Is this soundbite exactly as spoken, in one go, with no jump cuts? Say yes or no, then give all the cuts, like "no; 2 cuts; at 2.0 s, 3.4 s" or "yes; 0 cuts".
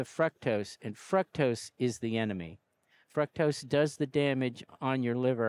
no; 1 cut; at 3.0 s